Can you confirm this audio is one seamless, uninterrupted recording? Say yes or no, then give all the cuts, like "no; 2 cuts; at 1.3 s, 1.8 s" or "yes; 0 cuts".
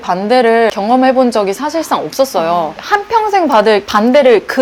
yes; 0 cuts